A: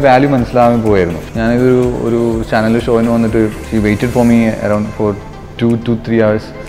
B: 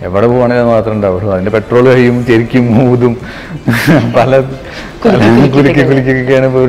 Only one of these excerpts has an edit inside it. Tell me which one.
A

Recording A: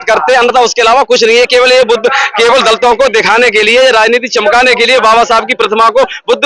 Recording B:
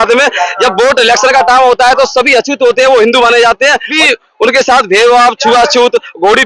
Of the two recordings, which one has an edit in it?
B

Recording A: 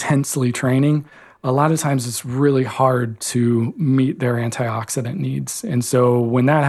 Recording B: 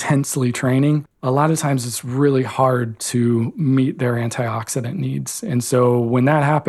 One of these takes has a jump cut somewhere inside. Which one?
B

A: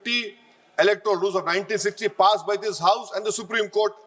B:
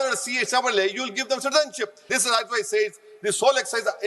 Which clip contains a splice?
B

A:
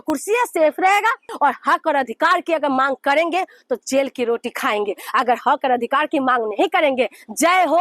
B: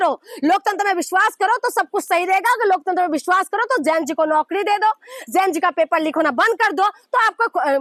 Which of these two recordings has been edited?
A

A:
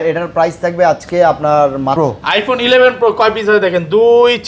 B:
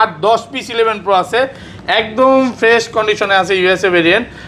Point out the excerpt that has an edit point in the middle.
A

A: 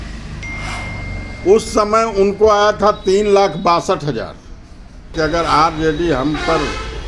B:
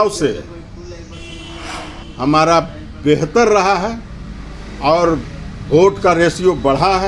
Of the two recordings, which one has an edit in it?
A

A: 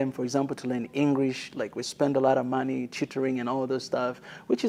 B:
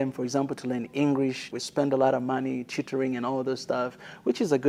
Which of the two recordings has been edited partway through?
B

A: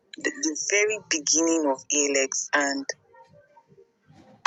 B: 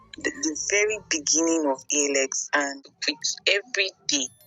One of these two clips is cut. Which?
B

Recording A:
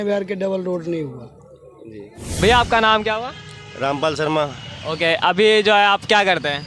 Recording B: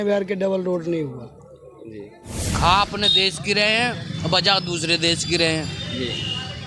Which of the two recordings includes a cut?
B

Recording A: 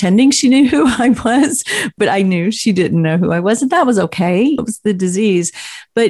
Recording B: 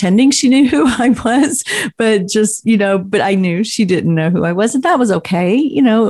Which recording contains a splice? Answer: A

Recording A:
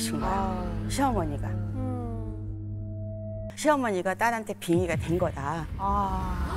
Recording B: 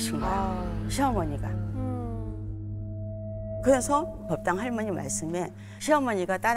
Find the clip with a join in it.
A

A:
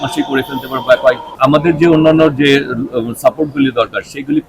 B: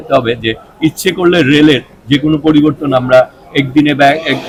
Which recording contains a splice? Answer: A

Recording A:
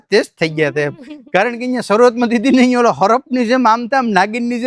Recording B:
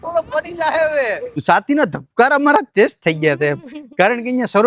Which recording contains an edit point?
B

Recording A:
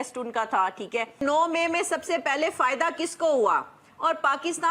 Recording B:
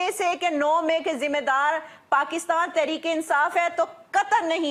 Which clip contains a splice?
A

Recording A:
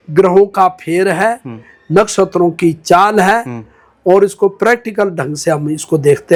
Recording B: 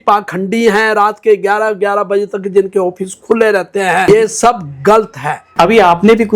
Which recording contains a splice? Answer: B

